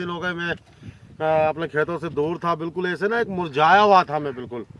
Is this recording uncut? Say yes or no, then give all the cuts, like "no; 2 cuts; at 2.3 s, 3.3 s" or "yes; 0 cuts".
yes; 0 cuts